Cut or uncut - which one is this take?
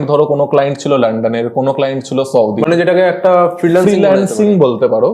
uncut